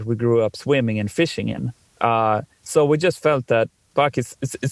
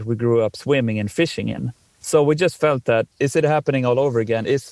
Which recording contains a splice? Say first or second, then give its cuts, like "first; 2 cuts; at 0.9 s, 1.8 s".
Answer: second; 2 cuts; at 1.9 s, 3.1 s